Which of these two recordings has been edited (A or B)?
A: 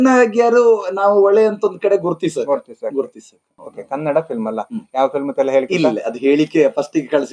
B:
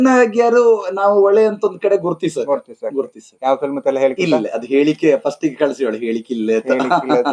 B